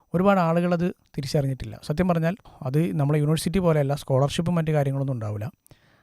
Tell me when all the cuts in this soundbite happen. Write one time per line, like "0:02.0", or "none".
0:02.5